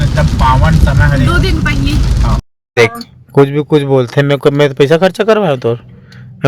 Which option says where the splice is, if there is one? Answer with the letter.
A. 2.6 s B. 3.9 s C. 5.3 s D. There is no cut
A